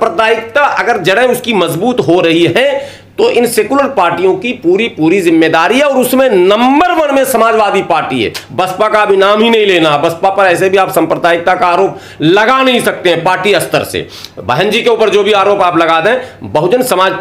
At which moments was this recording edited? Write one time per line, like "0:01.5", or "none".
0:08.4